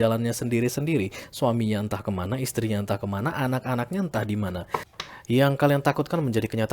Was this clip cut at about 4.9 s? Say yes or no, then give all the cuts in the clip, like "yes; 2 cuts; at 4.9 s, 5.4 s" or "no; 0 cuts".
yes; 1 cut; at 4.9 s